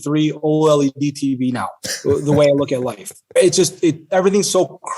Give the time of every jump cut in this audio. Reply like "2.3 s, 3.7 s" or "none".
3.4 s